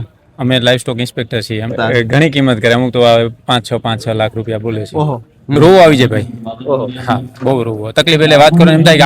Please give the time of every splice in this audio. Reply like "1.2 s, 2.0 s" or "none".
1.7 s, 5.6 s